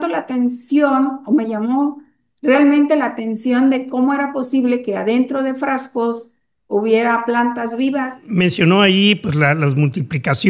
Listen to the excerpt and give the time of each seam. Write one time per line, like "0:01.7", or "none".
0:08.2